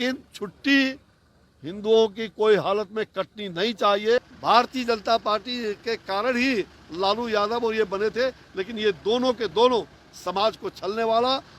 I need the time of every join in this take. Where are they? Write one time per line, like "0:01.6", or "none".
0:04.2